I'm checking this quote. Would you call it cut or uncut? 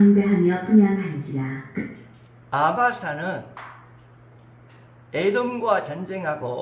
uncut